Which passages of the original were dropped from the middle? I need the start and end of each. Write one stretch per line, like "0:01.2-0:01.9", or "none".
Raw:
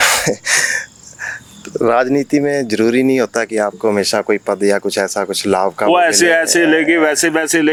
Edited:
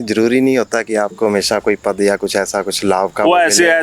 none